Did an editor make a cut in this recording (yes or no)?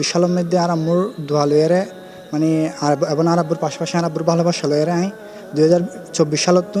no